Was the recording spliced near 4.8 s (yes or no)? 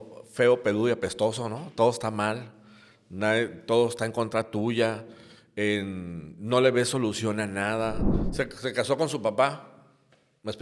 no